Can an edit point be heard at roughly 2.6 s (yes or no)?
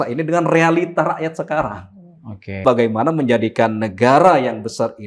yes